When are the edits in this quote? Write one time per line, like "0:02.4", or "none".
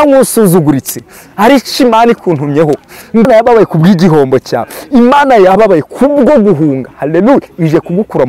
0:03.2